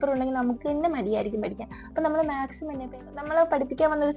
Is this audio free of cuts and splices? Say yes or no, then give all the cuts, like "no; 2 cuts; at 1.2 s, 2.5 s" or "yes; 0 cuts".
no; 1 cut; at 2.8 s